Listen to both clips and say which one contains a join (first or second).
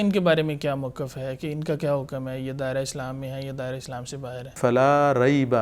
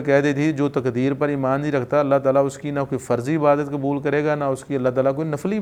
first